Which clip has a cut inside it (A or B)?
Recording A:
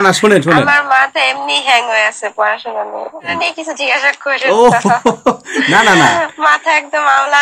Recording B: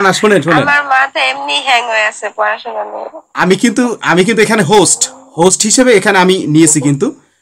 A